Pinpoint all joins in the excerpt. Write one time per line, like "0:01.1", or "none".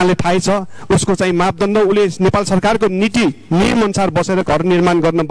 none